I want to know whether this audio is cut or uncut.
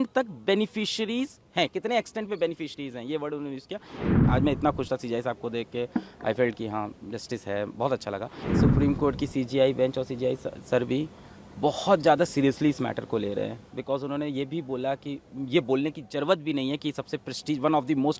cut